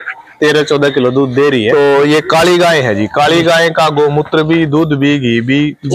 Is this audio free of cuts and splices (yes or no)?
no